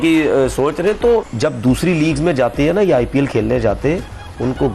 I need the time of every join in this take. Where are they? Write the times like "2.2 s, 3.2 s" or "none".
1.3 s